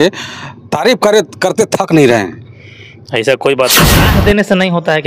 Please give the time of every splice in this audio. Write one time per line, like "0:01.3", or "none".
0:03.9